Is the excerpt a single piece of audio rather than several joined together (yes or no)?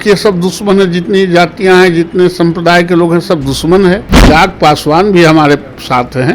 no